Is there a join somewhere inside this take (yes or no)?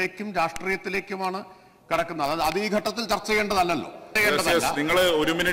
yes